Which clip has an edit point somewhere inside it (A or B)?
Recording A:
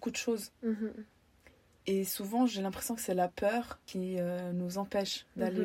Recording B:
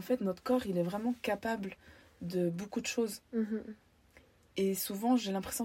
A